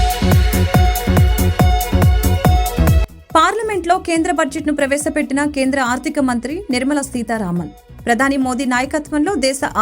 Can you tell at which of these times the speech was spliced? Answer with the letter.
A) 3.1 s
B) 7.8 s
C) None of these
A